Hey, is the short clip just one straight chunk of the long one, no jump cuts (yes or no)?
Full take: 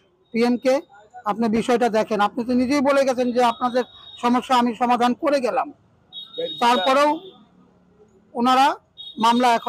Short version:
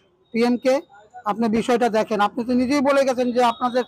yes